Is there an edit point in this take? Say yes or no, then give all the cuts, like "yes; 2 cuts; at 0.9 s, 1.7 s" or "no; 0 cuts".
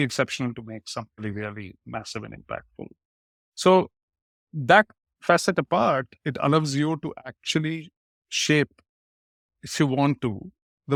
no; 0 cuts